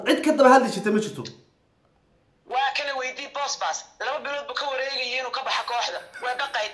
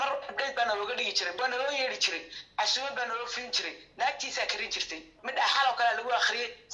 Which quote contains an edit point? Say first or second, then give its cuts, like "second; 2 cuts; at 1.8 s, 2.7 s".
second; 2 cuts; at 1.3 s, 5.1 s